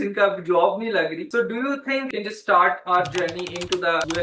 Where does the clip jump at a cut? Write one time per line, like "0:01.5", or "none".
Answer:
0:02.1